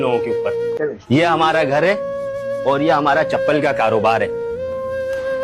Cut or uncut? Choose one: cut